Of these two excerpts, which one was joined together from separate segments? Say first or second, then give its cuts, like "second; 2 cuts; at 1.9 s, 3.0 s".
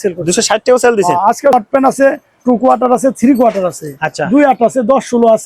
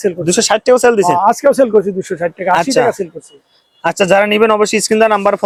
first; 1 cut; at 1.5 s